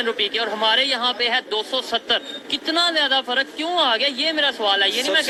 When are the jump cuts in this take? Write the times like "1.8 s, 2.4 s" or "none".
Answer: none